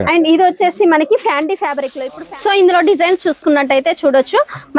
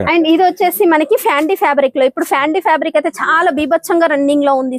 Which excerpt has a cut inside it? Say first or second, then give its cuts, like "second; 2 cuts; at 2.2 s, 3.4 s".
first; 1 cut; at 1.8 s